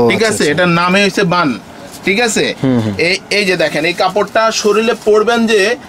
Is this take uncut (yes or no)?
yes